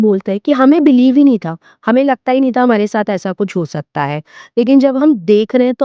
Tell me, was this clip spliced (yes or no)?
no